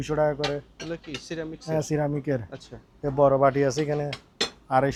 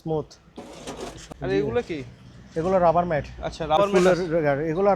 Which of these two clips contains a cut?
second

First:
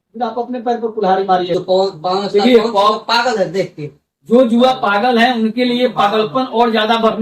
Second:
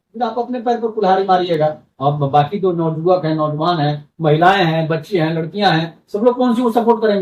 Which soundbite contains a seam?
first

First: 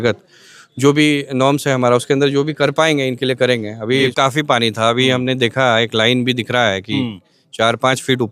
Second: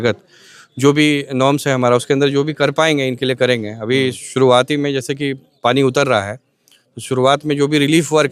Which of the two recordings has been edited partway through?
first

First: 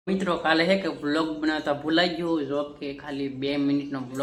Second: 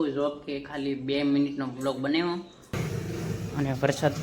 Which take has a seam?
second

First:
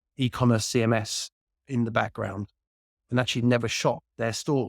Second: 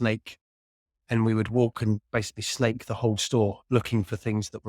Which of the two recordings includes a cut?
first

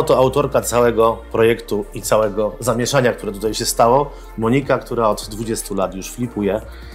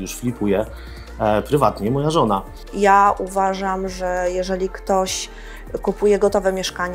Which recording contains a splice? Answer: second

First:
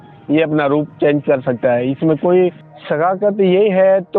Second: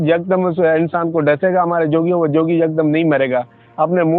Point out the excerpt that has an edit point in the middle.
first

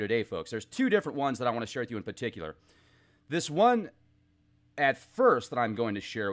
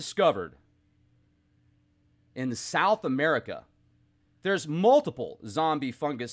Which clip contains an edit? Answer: first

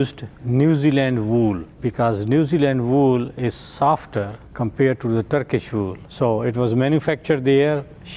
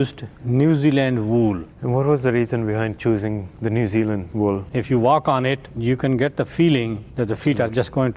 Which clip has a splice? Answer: second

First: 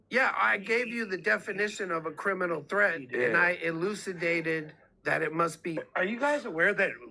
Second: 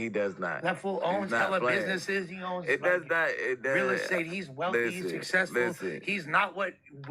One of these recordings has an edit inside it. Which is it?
first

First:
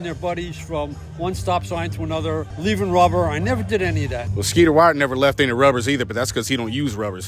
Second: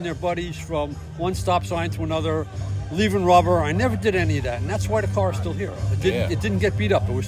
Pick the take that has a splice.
first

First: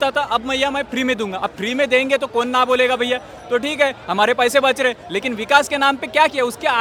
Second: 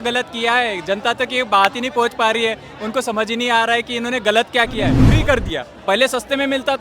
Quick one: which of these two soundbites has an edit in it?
second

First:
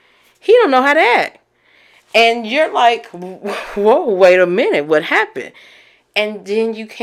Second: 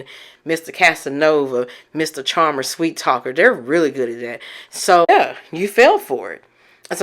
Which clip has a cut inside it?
second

